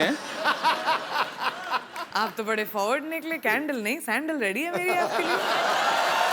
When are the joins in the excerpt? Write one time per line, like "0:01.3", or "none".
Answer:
none